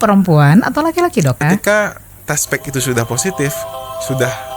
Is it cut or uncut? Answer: cut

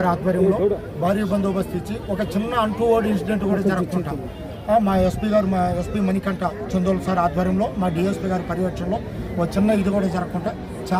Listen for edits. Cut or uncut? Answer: uncut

